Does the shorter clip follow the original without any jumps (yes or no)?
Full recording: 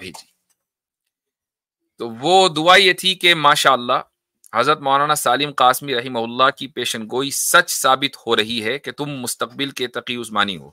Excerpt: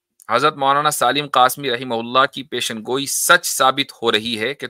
yes